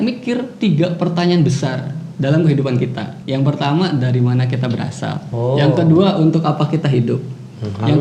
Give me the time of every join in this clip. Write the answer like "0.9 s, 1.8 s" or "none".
3.1 s, 5.2 s